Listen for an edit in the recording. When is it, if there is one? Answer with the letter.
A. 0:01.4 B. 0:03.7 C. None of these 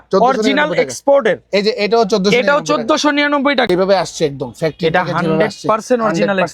B